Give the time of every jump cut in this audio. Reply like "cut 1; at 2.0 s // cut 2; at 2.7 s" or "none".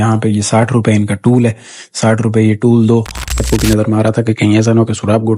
cut 1; at 3.4 s